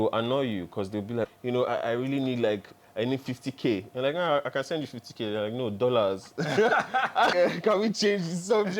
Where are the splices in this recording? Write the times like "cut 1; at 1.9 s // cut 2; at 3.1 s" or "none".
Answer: cut 1; at 1.3 s // cut 2; at 7.3 s